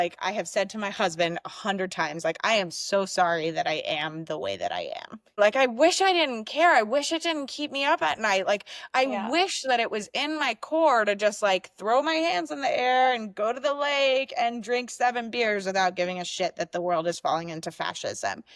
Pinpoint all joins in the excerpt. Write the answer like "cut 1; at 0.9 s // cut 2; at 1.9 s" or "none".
cut 1; at 5.3 s